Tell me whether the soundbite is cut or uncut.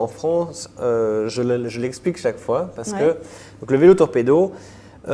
uncut